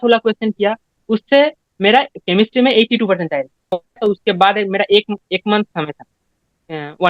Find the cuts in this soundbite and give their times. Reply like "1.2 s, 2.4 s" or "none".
3.7 s